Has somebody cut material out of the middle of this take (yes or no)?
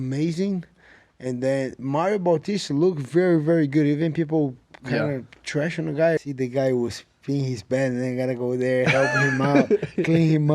yes